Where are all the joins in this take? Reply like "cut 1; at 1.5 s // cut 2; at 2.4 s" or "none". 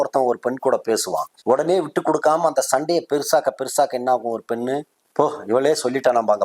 cut 1; at 1.3 s // cut 2; at 5.0 s